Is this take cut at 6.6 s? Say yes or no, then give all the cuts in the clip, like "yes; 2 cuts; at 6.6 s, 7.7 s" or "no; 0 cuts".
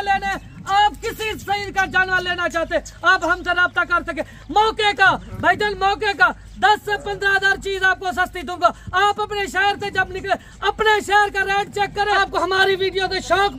no; 1 cut; at 12.2 s